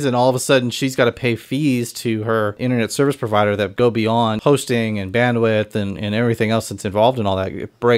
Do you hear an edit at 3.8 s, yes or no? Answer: yes